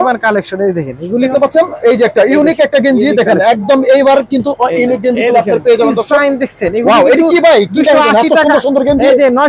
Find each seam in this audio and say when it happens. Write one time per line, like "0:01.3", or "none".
0:01.3